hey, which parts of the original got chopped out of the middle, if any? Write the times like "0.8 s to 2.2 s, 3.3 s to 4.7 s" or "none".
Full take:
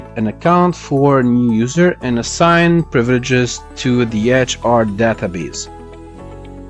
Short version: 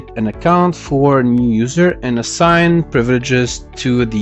none